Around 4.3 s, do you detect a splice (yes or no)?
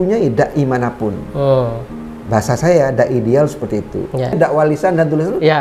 yes